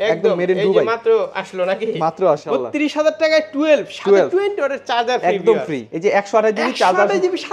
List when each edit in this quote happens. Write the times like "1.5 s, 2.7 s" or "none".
2.4 s, 5.8 s